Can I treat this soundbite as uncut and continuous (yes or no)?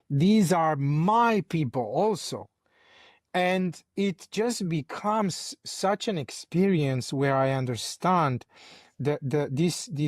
yes